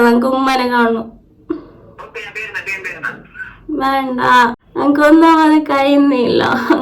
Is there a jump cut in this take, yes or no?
yes